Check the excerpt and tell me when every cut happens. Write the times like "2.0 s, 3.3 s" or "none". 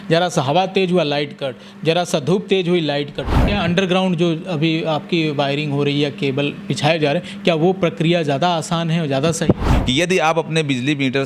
3.3 s, 9.6 s